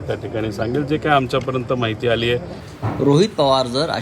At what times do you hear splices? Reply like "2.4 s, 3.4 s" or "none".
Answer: 2.6 s